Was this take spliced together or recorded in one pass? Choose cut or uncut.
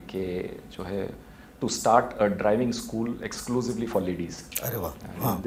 uncut